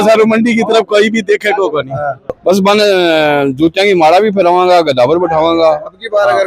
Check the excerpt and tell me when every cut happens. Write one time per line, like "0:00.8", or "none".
0:02.3

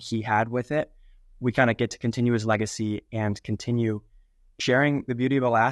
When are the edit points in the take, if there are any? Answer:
0:04.5

